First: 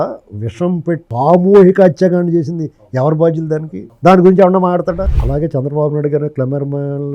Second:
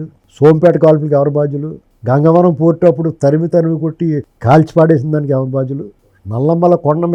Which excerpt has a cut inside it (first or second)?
first